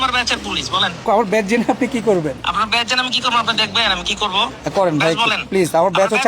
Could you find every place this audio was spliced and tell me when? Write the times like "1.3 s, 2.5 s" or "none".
1.0 s, 2.4 s, 5.4 s